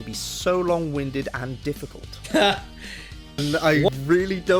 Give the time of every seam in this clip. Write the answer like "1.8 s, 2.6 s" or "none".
3.4 s